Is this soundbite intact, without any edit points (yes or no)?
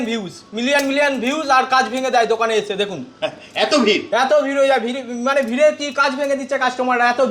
yes